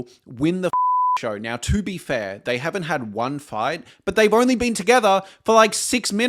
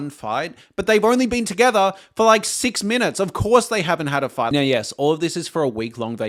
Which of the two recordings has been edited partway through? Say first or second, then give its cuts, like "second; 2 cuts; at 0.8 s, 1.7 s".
second; 1 cut; at 4.5 s